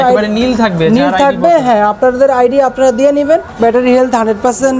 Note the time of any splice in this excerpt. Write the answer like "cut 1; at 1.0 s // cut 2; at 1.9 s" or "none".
cut 1; at 3.6 s